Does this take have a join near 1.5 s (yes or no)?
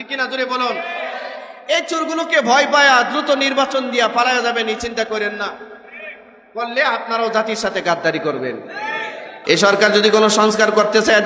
no